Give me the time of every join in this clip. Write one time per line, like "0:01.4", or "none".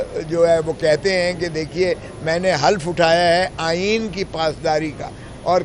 none